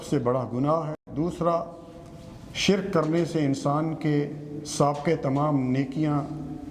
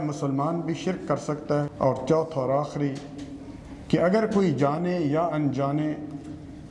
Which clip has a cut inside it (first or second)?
second